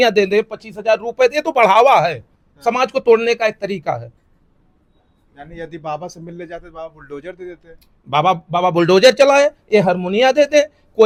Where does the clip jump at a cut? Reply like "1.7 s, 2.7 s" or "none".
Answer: none

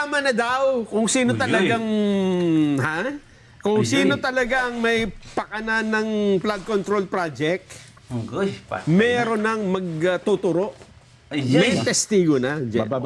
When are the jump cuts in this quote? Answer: none

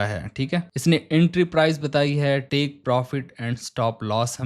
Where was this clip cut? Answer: none

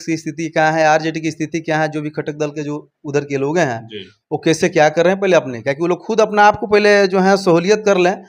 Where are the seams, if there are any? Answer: none

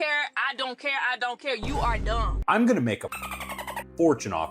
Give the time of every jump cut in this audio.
2.4 s

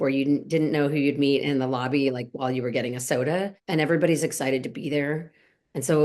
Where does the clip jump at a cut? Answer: 3.6 s

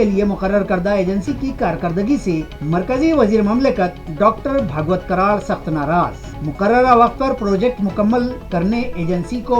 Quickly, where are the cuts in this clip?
none

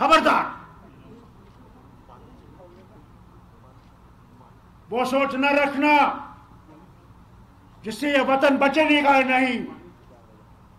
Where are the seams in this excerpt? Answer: none

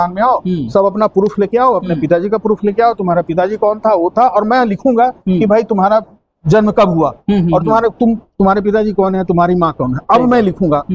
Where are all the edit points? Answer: none

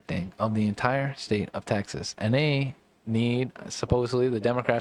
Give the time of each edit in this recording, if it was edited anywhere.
none

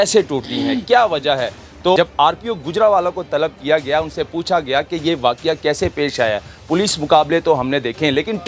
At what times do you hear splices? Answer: 2.0 s

